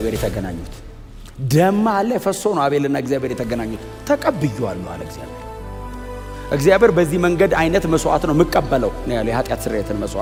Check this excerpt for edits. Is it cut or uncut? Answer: uncut